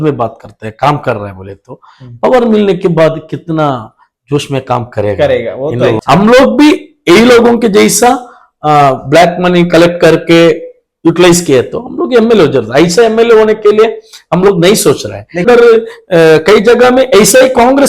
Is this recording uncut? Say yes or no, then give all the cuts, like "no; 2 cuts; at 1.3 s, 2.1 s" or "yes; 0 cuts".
no; 2 cuts; at 6.0 s, 15.4 s